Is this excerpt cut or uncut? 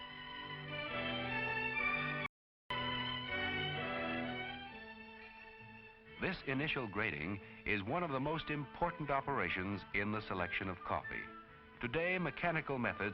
cut